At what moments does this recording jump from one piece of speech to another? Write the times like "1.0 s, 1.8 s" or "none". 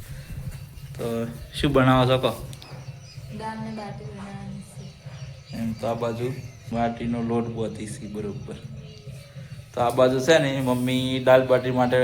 6.7 s